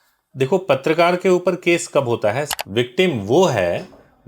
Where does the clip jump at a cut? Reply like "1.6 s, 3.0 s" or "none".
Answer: 2.5 s